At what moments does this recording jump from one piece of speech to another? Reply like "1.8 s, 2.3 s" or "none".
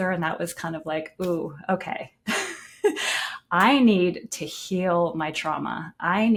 none